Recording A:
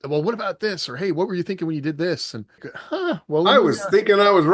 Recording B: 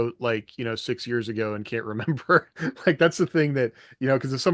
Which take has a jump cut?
A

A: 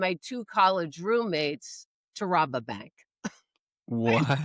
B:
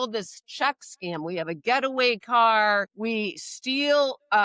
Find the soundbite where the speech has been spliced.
B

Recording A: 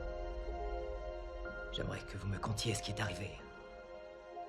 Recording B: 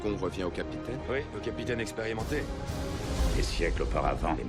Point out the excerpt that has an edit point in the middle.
A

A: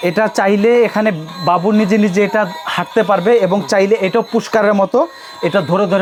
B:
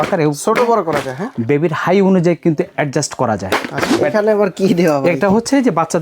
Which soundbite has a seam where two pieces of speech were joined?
B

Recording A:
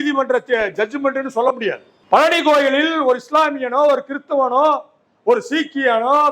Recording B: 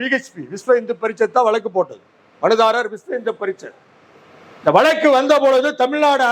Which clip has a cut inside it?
A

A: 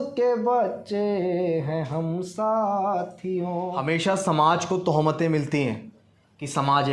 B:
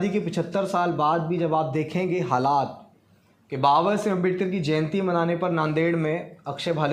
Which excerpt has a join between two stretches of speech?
A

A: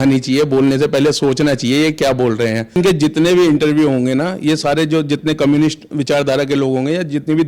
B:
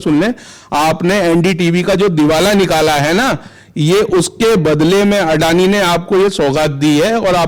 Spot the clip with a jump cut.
A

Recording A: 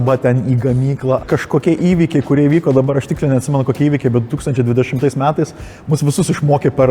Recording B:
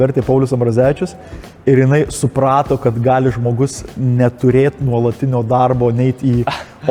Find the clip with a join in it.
A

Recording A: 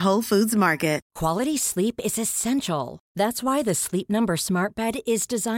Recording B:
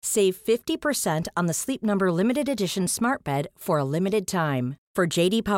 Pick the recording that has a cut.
A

